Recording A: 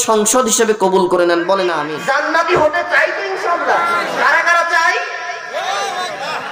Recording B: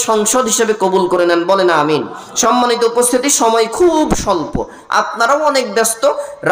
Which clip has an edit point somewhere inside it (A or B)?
A